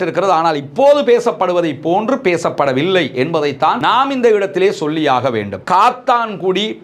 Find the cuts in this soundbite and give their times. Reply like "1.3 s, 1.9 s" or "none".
5.6 s